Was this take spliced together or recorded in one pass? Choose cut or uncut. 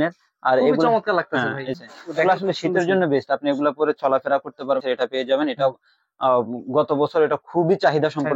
cut